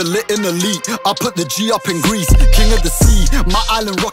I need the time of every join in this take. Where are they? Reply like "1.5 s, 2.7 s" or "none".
none